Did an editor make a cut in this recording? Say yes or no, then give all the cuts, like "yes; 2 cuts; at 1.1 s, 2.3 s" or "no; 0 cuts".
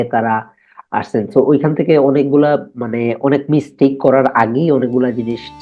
no; 0 cuts